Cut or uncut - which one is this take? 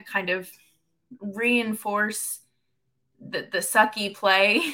uncut